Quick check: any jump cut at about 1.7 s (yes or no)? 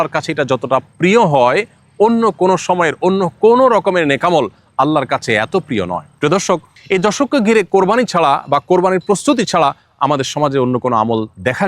no